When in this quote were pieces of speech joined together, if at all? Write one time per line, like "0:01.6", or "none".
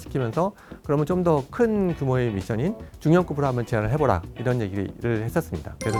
none

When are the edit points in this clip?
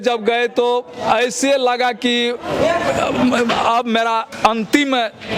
none

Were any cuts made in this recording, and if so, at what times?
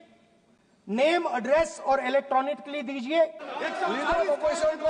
0:03.4

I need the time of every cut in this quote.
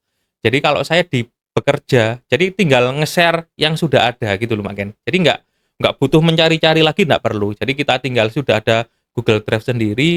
none

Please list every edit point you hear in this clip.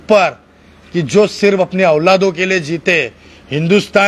none

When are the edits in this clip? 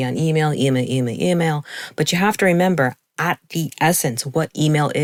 none

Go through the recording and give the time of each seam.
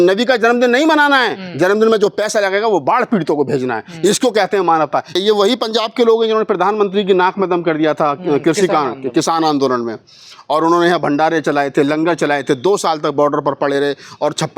0:05.1

